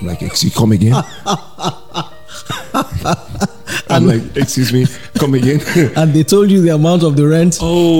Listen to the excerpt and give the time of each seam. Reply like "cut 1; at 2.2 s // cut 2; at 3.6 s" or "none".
none